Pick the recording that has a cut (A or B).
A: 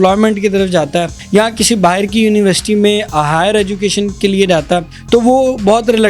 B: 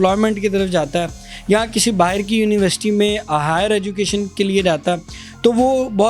A